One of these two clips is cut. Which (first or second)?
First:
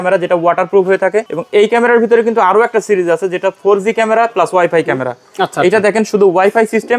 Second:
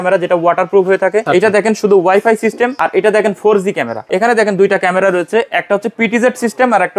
second